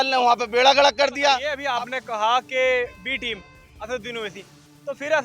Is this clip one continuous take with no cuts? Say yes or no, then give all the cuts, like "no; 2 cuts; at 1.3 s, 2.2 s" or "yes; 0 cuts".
no; 1 cut; at 1.6 s